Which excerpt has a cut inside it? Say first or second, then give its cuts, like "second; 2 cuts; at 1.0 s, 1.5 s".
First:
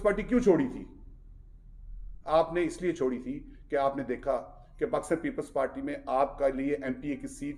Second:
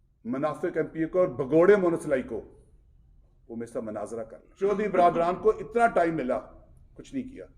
second; 1 cut; at 4.4 s